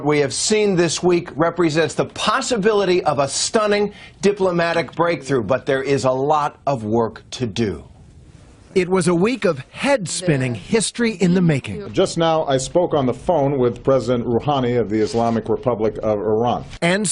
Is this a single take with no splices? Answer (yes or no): no